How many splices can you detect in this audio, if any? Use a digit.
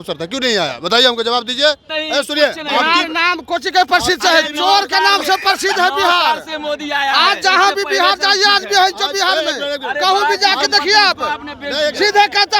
1